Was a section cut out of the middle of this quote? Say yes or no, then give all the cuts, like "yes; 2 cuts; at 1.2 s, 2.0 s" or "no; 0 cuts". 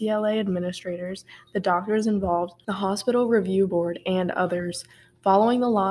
yes; 1 cut; at 2.6 s